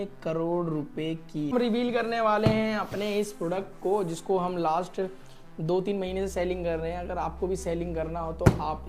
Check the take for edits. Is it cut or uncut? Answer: cut